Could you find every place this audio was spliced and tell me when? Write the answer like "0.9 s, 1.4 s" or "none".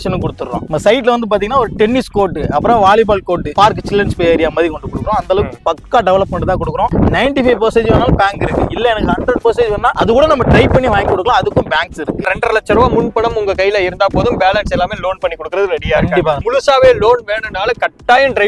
6.9 s, 12.3 s, 16.4 s